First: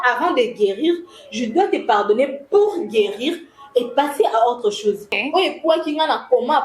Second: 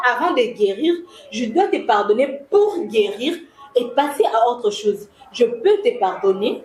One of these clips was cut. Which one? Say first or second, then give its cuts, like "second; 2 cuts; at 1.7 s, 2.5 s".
first; 1 cut; at 5.2 s